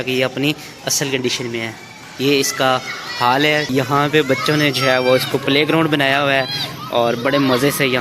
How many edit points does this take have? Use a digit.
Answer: 1